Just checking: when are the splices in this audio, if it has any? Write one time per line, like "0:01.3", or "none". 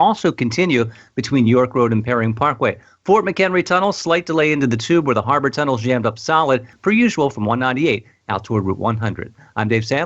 0:06.7